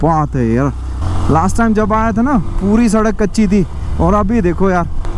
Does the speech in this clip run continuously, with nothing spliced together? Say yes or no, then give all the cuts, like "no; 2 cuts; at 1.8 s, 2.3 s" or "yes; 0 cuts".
yes; 0 cuts